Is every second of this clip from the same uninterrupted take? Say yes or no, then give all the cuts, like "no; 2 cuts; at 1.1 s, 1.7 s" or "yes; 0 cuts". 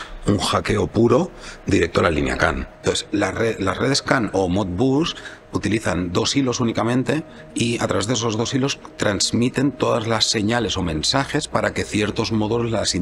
no; 1 cut; at 2.7 s